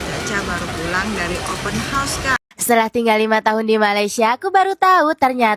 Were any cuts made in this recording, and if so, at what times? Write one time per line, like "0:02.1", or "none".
0:02.4